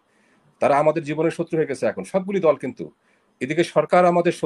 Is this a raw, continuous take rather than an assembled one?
yes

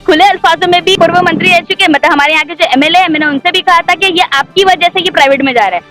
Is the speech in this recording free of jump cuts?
no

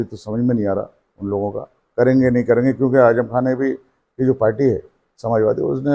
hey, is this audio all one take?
yes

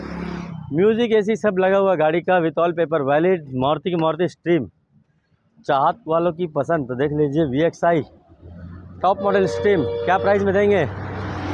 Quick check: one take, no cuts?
yes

